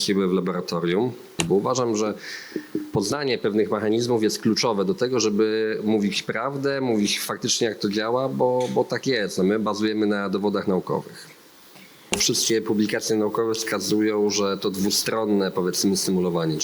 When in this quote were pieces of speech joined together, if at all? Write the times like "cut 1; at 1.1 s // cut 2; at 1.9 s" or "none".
cut 1; at 1.4 s // cut 2; at 12.2 s